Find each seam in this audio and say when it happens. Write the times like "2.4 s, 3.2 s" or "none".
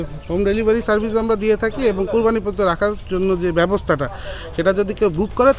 none